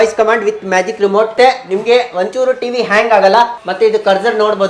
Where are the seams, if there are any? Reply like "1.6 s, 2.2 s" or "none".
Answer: 1.3 s, 3.6 s